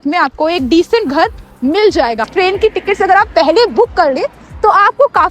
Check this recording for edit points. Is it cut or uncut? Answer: cut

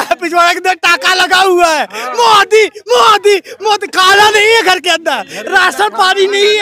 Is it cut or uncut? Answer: uncut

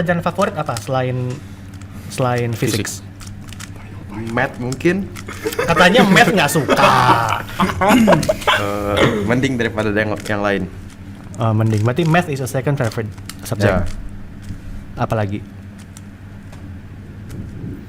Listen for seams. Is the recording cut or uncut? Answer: uncut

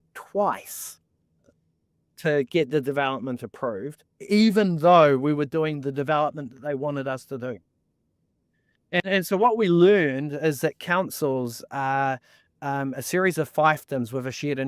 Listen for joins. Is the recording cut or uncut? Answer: uncut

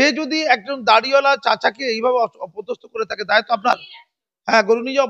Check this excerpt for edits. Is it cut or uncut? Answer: uncut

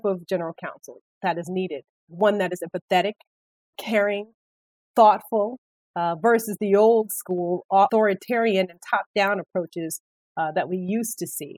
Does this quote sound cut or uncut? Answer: cut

